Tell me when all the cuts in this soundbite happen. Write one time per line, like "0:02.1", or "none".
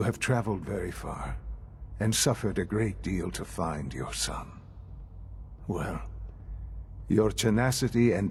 none